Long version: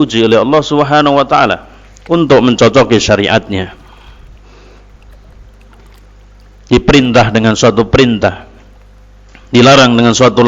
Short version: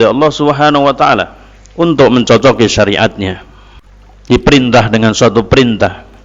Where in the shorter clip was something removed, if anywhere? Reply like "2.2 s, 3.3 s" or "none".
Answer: 4.3 s

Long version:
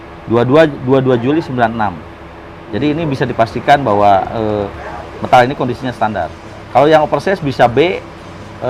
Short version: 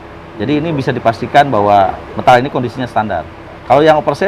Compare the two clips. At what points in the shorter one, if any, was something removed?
2.0 s

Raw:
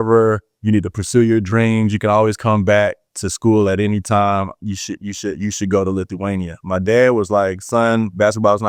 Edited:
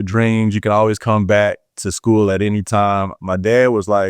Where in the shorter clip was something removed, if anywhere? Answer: 3.2 s

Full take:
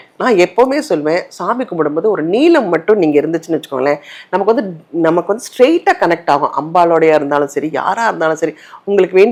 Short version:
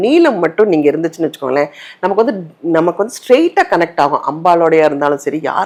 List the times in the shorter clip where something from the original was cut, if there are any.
none

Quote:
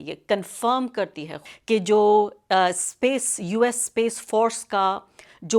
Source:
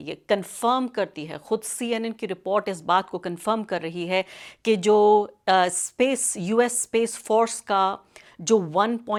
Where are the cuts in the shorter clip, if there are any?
1.4 s

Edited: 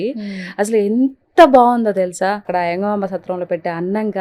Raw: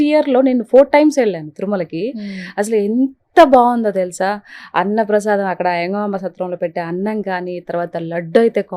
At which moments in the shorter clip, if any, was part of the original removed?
2.5 s

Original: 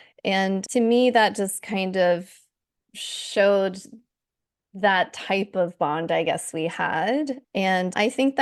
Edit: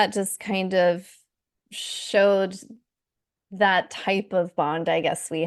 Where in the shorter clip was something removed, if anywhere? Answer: none

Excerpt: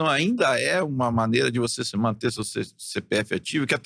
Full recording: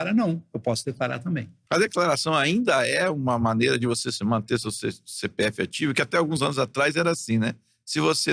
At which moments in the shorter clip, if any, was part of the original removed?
none

